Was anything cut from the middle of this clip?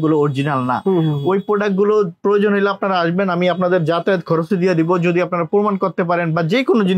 no; 0 cuts

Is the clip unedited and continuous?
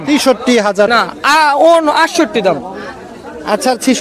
no; 1 cut; at 0.9 s

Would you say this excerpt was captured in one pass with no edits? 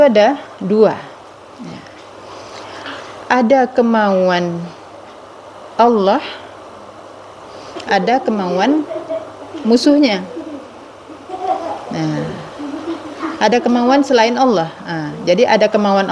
yes; 0 cuts

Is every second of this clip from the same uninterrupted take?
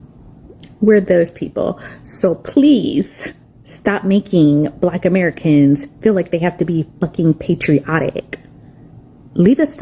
yes; 0 cuts

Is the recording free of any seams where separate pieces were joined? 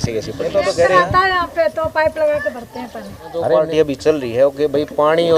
no; 2 cuts; at 0.7 s, 3.5 s

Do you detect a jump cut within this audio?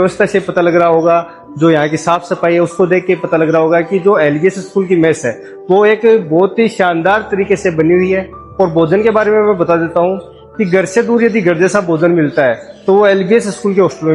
no; 0 cuts

